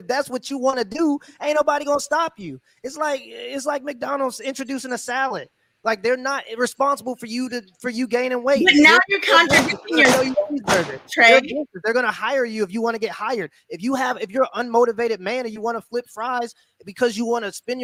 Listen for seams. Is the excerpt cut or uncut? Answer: uncut